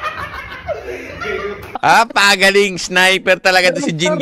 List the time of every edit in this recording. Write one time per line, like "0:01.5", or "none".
0:01.7

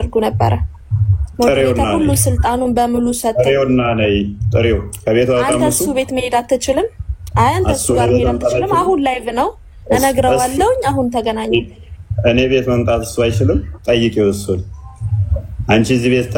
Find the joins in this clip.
none

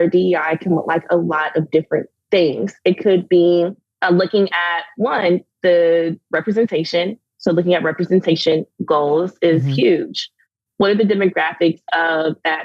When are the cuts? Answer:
0:02.1
0:03.9

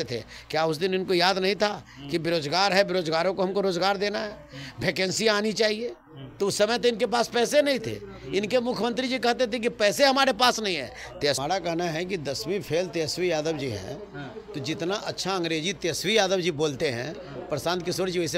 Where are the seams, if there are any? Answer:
0:11.4

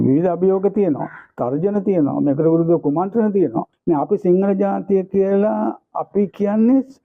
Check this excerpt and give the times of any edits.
0:03.7

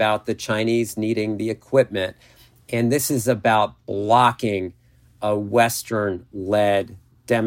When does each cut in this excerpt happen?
none

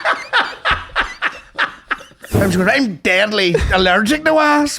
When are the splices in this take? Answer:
0:02.4

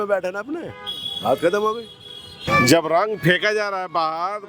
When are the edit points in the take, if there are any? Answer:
0:02.4

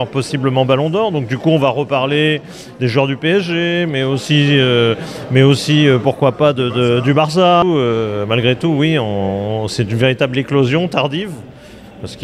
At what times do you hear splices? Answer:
0:07.6

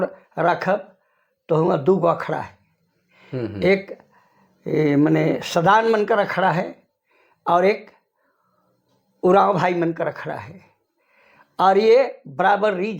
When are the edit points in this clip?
none

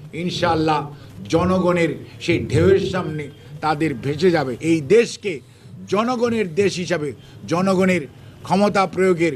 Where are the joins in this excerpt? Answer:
0:04.6

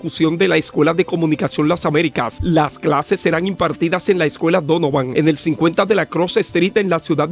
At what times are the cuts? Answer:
none

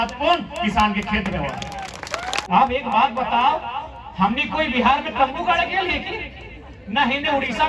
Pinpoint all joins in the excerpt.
0:02.4

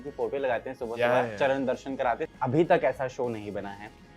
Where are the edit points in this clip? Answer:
0:02.3

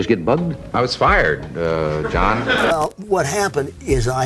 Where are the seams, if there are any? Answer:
0:02.7

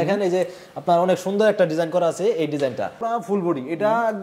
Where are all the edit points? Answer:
0:03.0

